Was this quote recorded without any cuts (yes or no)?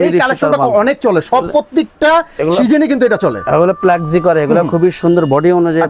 yes